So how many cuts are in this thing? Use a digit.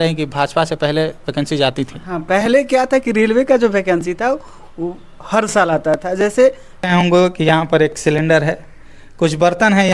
1